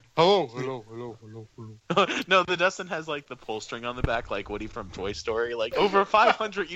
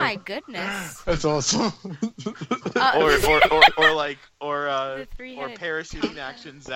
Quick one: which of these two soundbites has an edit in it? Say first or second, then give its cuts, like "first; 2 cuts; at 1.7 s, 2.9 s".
first; 1 cut; at 5.7 s